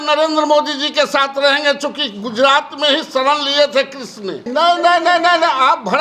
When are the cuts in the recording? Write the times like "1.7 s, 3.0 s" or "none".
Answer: 4.4 s